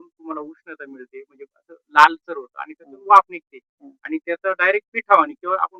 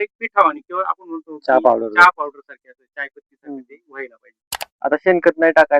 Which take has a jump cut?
second; 1 cut; at 4.8 s

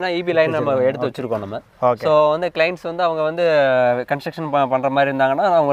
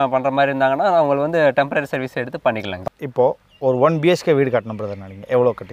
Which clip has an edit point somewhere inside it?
second; 1 cut; at 2.7 s

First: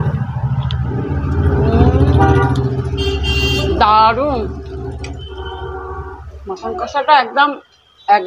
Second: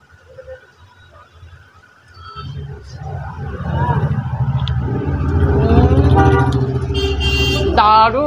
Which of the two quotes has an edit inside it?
second; 1 cut; at 2.4 s

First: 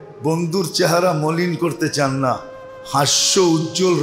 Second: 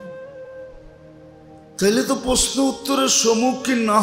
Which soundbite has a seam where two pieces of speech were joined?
second; 1 cut; at 1.1 s

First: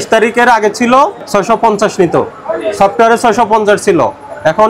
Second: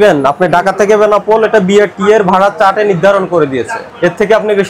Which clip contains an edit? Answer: first; 1 cut; at 1.2 s

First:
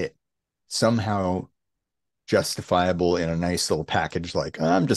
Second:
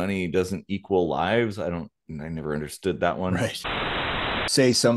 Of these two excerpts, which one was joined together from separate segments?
second; 1 cut; at 3.9 s

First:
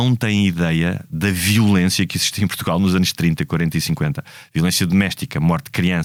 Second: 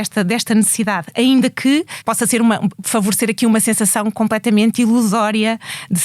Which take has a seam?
second; 2 cuts; at 1.9 s, 2.8 s

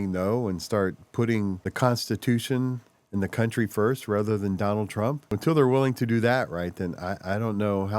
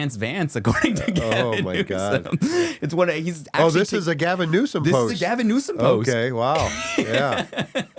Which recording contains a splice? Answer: first; 2 cuts; at 1.6 s, 5.3 s

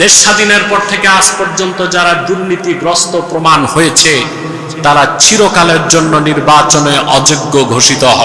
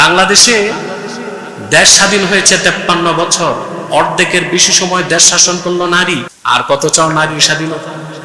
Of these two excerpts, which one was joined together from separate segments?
second; 1 cut; at 6.3 s

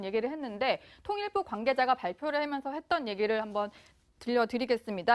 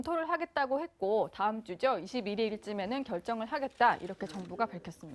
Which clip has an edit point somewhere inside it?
second; 1 cut; at 3.4 s

